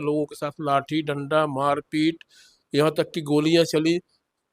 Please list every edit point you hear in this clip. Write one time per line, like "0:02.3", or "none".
none